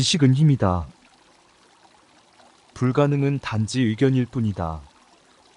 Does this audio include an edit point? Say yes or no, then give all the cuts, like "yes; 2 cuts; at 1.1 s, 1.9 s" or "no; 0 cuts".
yes; 3 cuts; at 0.9 s, 2.5 s, 4.8 s